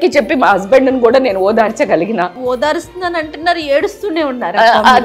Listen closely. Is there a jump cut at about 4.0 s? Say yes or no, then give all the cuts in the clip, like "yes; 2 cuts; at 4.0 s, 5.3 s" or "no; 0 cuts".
no; 1 cut; at 2.4 s